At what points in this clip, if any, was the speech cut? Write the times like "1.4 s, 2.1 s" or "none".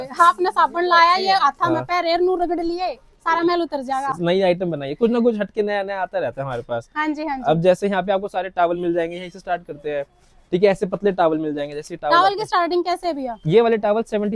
none